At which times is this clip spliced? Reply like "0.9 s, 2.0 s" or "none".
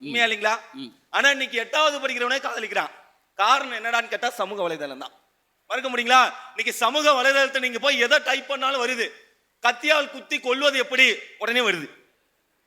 none